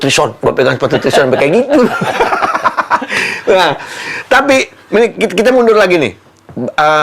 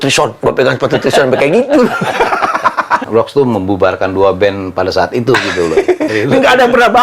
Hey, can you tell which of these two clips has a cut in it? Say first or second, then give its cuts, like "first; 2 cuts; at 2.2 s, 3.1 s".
second; 2 cuts; at 3.0 s, 6.1 s